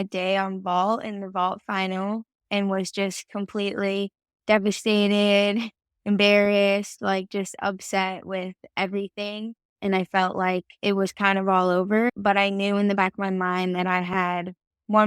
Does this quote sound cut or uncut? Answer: cut